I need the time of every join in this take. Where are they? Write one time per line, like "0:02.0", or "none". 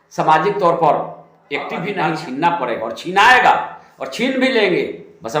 0:01.9

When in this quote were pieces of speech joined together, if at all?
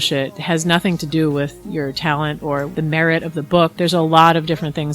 0:02.7

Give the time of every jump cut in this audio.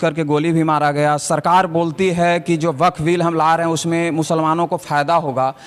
none

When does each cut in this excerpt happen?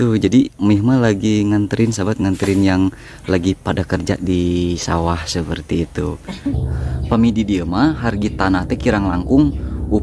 0:06.7

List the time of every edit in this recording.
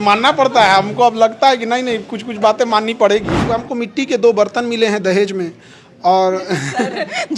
0:03.5

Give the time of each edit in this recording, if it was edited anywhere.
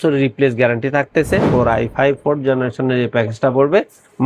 0:01.5

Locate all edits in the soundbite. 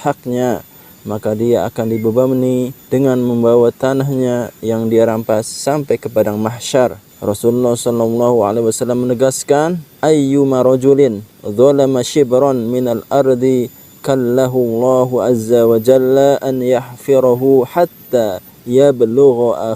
0:02.8
0:07.1
0:09.9

